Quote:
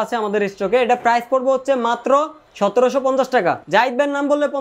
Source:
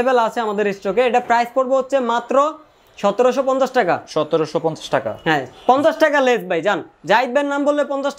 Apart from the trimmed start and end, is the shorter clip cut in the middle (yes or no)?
yes